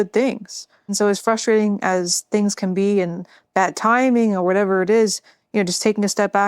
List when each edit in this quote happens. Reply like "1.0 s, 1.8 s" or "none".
0.9 s